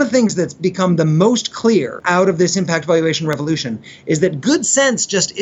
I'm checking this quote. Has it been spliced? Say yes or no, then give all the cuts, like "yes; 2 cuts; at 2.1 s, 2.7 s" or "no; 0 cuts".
yes; 1 cut; at 2.0 s